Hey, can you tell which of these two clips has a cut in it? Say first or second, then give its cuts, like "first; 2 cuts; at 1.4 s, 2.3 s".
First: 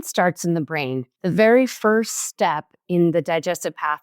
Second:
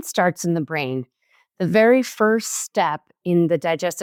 first; 1 cut; at 1.1 s